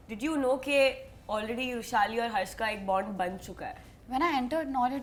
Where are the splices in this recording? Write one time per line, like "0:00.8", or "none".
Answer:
none